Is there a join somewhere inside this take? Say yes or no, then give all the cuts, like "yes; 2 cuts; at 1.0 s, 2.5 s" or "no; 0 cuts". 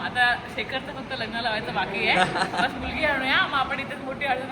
no; 0 cuts